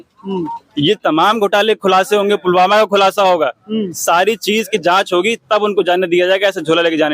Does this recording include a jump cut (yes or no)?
no